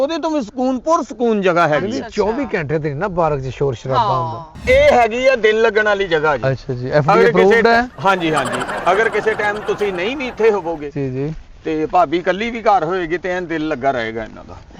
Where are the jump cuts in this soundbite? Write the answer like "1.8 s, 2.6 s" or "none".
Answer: 4.5 s